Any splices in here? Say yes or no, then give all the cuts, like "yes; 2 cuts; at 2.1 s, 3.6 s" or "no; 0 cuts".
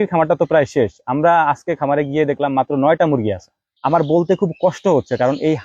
yes; 1 cut; at 3.6 s